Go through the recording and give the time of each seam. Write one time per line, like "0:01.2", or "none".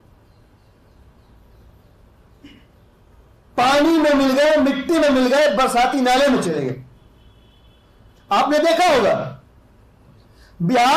none